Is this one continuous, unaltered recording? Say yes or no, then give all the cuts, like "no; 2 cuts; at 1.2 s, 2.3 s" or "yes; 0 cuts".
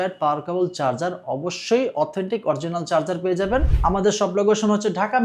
no; 1 cut; at 3.7 s